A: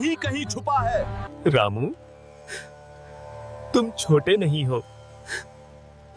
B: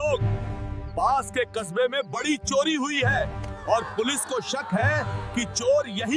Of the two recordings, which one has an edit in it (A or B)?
A